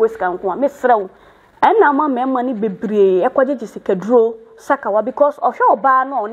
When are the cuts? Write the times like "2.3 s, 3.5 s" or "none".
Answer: 1.2 s

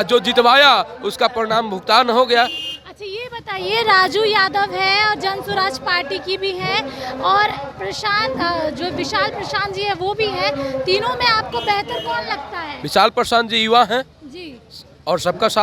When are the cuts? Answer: none

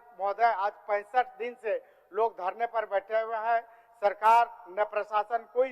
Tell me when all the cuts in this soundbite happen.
none

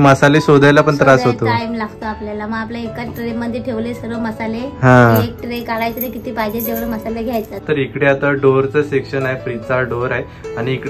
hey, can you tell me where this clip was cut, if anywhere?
7.6 s

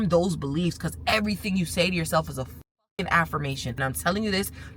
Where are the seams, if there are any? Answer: 3.7 s

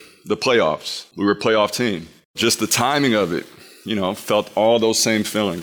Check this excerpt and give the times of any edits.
2.4 s

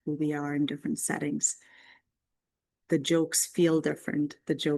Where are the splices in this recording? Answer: 2.7 s

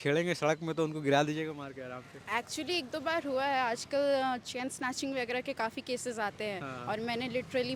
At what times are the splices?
none

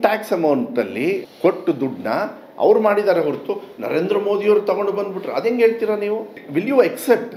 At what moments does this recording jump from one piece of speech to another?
1.3 s, 6.4 s

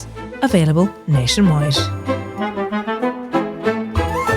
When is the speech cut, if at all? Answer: 1.7 s

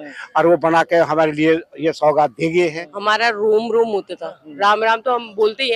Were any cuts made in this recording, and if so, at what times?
2.9 s

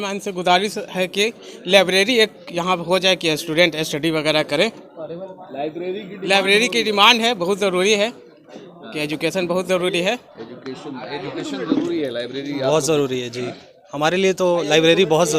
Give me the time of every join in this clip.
none

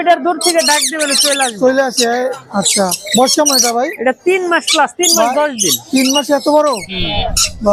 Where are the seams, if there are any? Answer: none

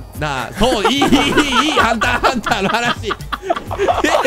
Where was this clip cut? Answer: none

